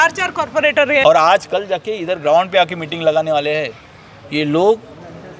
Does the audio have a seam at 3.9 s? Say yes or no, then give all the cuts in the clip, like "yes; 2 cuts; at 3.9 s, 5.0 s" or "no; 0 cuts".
no; 1 cut; at 1.0 s